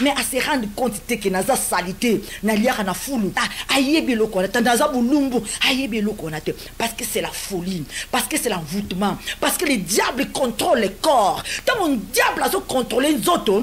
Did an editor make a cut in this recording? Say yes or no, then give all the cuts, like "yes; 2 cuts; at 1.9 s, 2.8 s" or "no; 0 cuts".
yes; 1 cut; at 3.5 s